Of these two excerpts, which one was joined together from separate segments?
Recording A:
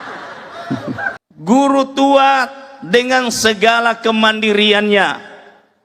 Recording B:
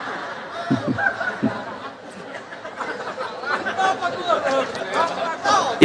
A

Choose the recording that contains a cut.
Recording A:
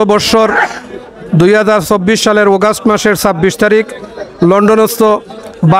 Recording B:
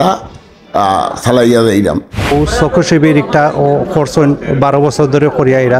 B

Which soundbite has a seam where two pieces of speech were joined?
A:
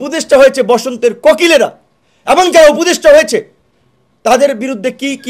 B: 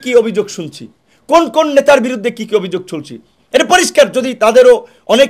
A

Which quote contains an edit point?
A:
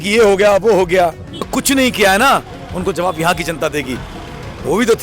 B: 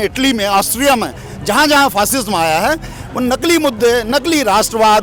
A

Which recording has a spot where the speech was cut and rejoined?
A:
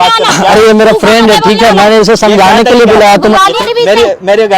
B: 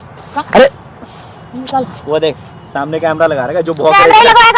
A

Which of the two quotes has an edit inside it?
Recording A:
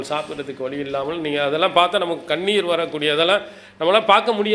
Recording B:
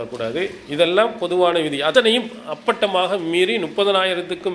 B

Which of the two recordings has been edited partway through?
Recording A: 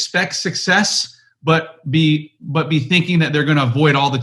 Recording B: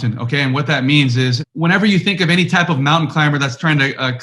B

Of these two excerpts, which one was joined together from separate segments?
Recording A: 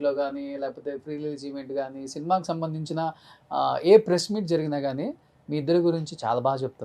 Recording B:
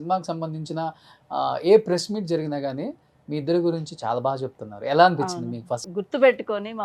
B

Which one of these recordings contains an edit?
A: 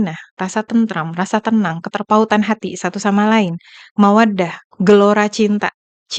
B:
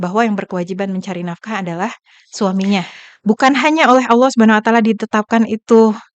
B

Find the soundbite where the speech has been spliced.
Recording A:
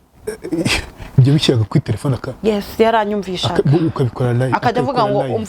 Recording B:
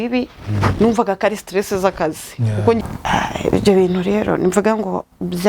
B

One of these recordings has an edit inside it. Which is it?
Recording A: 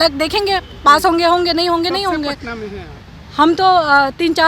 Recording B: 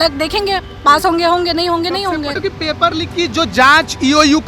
B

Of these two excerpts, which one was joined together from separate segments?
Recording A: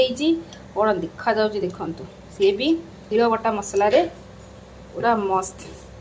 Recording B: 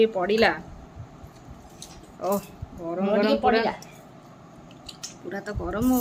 A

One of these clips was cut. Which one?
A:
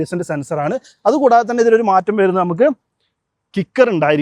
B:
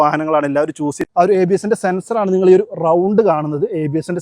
B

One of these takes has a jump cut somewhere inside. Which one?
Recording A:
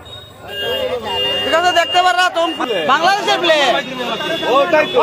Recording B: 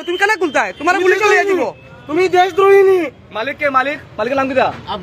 A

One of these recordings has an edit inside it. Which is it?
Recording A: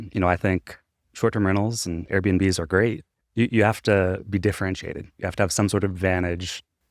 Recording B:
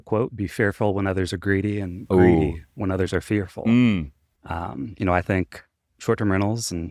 A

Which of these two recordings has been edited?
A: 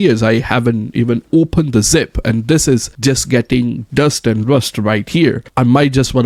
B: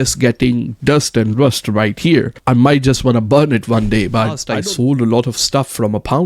B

